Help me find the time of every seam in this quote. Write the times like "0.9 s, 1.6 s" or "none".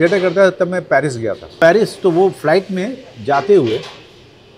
1.5 s